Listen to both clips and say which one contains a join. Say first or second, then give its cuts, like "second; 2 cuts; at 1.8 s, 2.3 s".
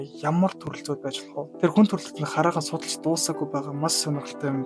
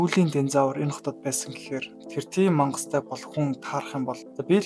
second; 1 cut; at 2.0 s